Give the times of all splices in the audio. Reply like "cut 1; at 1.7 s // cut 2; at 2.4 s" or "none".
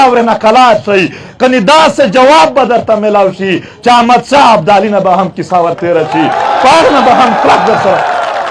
none

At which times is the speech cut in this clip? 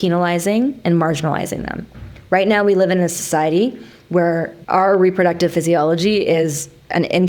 cut 1; at 4.6 s

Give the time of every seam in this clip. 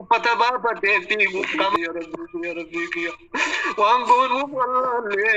cut 1; at 1.8 s

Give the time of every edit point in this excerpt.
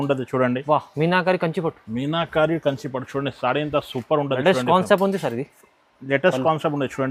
none

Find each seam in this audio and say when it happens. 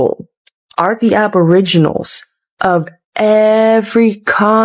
none

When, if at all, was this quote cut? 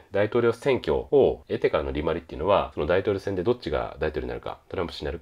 cut 1; at 1.1 s // cut 2; at 2.7 s

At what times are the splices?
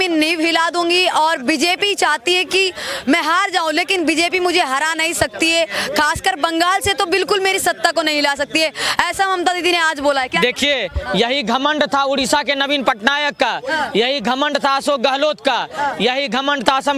none

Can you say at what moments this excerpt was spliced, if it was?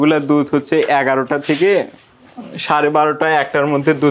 none

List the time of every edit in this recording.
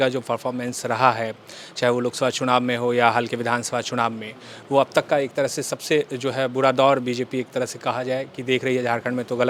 none

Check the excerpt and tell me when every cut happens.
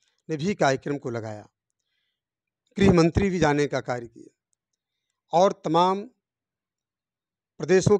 none

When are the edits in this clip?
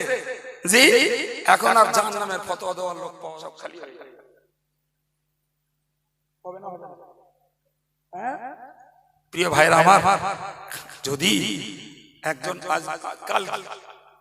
cut 1; at 3.3 s

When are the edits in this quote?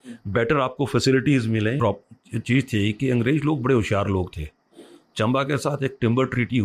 cut 1; at 1.8 s

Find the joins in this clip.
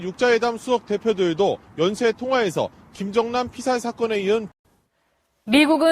cut 1; at 4.6 s

